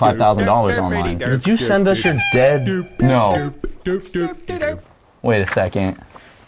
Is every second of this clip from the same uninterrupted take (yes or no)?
no